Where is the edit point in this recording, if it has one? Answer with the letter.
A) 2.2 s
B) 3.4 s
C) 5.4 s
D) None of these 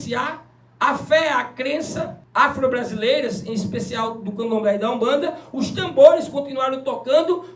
A